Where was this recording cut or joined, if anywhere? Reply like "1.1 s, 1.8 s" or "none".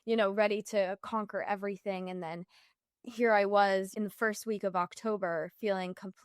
3.9 s